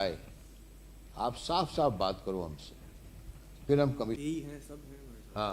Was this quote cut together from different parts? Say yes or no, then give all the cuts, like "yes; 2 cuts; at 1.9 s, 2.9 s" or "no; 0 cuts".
yes; 1 cut; at 4.2 s